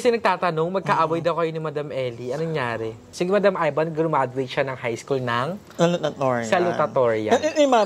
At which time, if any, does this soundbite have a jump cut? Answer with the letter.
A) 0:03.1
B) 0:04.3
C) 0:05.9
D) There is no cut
A